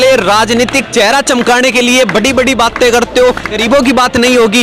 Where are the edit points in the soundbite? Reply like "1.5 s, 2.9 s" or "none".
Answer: 3.6 s